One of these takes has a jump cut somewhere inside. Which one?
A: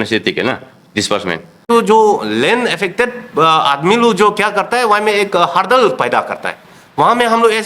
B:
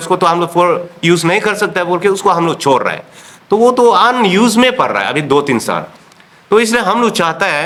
A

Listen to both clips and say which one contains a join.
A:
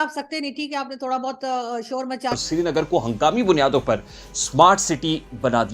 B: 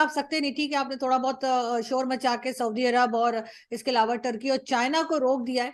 A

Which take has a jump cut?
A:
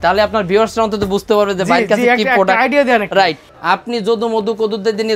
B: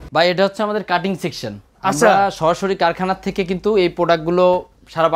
A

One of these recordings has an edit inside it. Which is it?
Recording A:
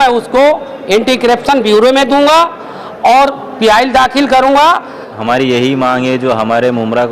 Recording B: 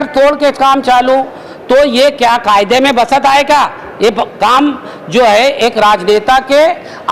A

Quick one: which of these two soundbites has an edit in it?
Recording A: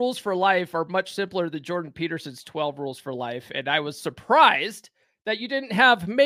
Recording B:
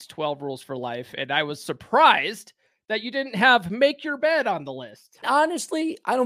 B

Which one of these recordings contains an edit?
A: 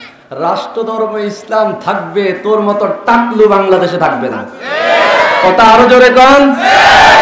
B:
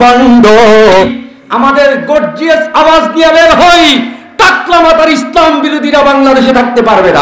B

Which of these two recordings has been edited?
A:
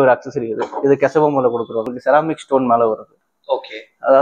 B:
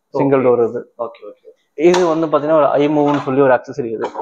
A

